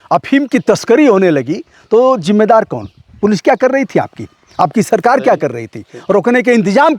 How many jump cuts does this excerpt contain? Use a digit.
0